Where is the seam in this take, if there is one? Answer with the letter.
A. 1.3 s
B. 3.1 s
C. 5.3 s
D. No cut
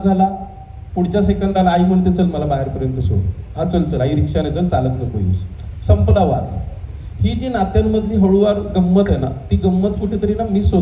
D